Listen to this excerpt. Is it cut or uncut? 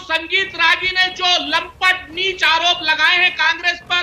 uncut